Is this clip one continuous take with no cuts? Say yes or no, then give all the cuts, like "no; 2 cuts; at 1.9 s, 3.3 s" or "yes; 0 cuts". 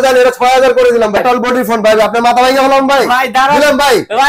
no; 1 cut; at 1.2 s